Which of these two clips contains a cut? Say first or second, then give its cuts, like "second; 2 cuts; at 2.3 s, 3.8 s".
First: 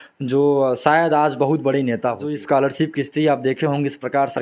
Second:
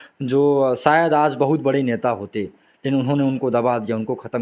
first; 1 cut; at 2.3 s